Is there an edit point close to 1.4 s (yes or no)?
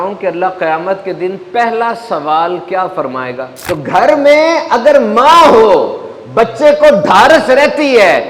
no